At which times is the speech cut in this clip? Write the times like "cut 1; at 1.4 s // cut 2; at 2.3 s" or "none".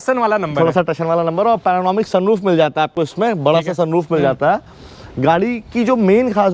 none